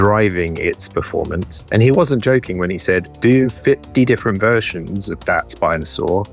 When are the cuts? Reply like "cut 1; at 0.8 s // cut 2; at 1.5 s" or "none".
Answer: cut 1; at 1.5 s

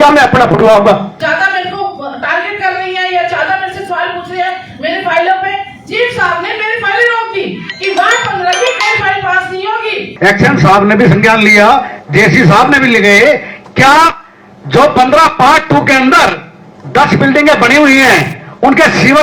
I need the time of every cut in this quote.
cut 1; at 1.1 s // cut 2; at 10.1 s

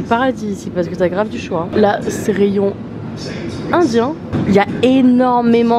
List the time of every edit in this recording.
none

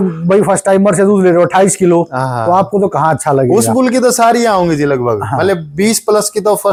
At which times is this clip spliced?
none

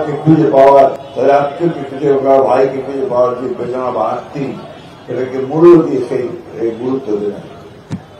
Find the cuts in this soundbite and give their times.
cut 1; at 1.0 s

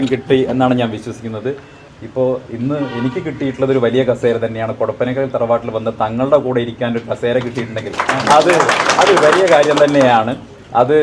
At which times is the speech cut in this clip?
cut 1; at 1.7 s

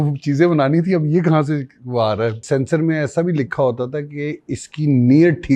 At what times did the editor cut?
cut 1; at 2.4 s

